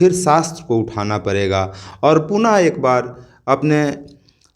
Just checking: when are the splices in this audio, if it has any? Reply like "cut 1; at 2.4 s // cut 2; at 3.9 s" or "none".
none